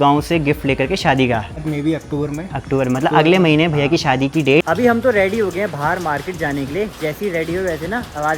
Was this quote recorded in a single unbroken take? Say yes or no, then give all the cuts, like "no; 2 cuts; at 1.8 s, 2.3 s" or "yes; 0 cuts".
no; 2 cuts; at 1.6 s, 4.7 s